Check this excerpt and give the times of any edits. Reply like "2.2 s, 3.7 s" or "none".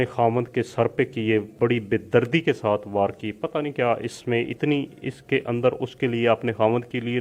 1.5 s, 4.5 s

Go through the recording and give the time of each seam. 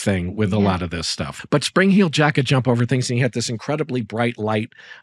1.3 s

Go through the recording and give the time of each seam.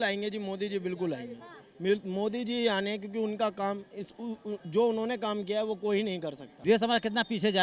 6.6 s

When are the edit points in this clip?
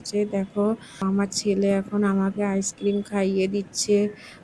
1.0 s

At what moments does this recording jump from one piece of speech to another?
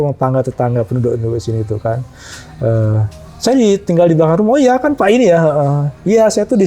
none

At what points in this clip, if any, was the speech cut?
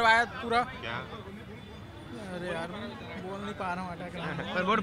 none

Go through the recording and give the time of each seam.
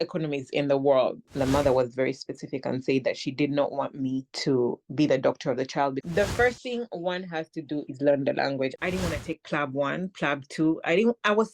1.3 s, 6.0 s, 8.7 s

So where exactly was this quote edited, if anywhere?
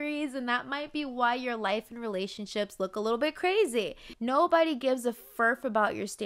4.1 s

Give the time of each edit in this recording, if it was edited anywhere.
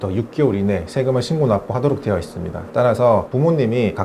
none

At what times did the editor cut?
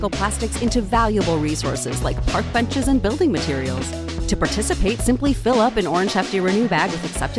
none

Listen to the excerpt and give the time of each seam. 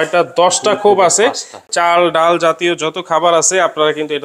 1.6 s

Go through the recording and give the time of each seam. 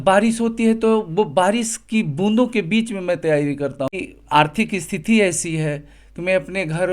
3.9 s

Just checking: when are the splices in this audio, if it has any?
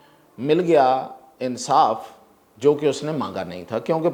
none

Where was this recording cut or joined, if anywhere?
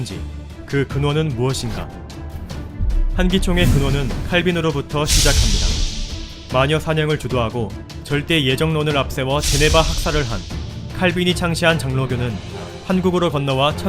6.6 s

